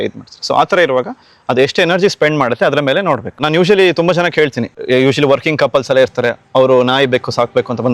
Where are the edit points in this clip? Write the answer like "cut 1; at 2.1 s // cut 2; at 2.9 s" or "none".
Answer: cut 1; at 3.4 s // cut 2; at 4.7 s